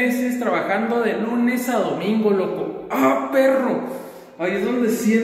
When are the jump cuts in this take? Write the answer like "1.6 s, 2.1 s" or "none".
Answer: none